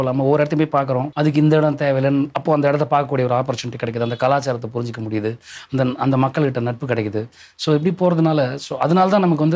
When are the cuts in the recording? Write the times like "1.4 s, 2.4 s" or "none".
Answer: 1.1 s